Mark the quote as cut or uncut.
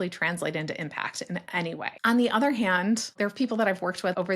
cut